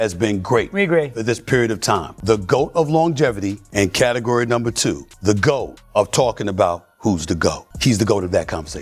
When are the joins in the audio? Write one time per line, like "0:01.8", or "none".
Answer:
0:02.1
0:03.6
0:05.1
0:05.8
0:07.7